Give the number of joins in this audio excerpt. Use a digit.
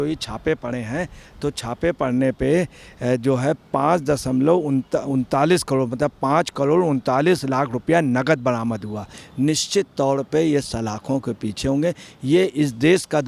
1